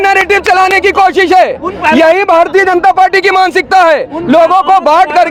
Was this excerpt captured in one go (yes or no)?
yes